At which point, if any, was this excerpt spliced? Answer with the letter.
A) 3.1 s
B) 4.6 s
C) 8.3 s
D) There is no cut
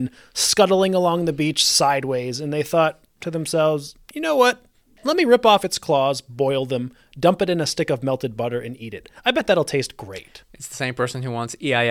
D